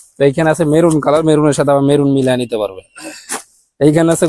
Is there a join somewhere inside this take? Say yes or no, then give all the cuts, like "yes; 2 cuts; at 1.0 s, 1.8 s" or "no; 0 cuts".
no; 0 cuts